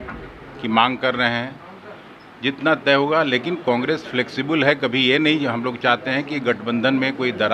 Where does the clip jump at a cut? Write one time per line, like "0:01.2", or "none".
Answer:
none